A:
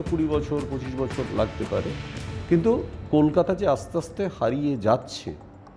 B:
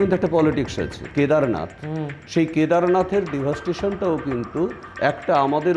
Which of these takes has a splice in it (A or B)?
B